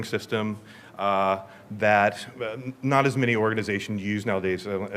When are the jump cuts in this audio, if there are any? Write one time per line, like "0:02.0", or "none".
none